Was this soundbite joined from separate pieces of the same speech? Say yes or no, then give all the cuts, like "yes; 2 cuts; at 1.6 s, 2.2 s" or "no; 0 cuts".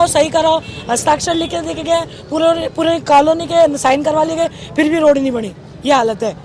no; 0 cuts